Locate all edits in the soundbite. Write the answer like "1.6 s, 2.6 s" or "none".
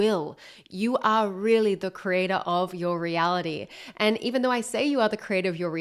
none